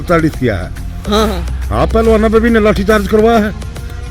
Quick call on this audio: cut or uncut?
cut